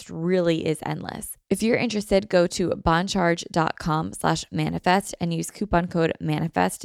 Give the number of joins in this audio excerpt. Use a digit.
1